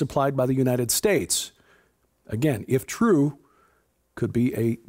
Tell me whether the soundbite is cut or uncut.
cut